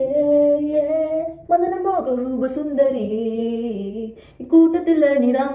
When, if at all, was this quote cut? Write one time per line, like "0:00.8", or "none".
0:01.4